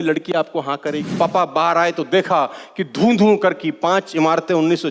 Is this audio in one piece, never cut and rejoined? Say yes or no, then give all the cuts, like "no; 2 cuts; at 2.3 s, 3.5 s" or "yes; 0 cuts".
no; 1 cut; at 1.1 s